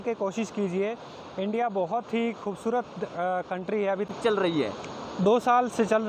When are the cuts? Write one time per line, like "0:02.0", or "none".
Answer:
0:04.1

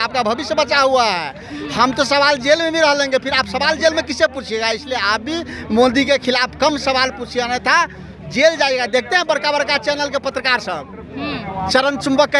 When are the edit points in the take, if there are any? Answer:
none

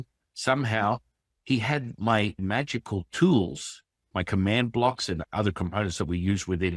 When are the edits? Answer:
0:02.4
0:05.2

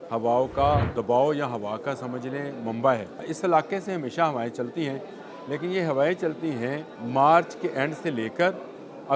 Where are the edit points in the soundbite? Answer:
0:00.9
0:03.3
0:06.9

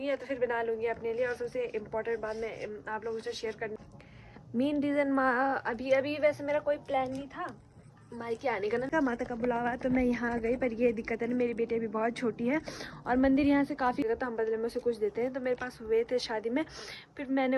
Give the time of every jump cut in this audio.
0:03.7
0:08.9
0:14.1

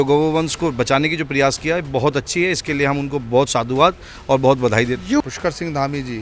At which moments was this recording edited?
0:05.2

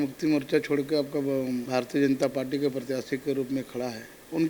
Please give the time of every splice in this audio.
0:01.6

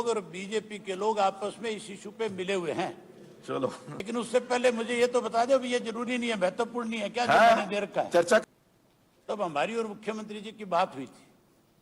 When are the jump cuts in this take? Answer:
0:03.9
0:08.4

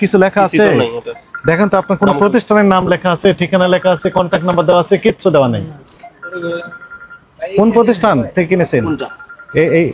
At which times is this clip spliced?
none

